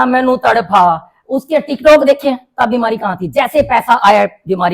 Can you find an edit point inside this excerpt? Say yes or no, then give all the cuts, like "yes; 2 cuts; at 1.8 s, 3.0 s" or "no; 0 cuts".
no; 0 cuts